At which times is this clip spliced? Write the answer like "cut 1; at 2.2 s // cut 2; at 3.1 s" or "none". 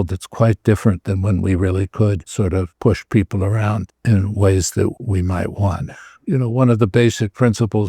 cut 1; at 2.7 s // cut 2; at 3.9 s // cut 3; at 4.9 s // cut 4; at 6.1 s

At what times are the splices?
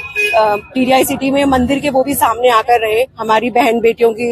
cut 1; at 3.2 s

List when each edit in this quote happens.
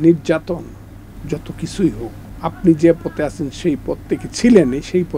cut 1; at 2.2 s

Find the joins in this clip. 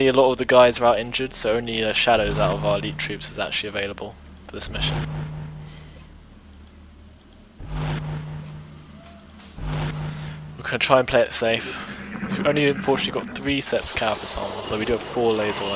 cut 1; at 9.8 s // cut 2; at 10.1 s

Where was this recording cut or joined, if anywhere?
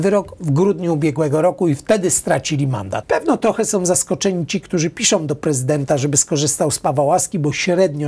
cut 1; at 2.9 s

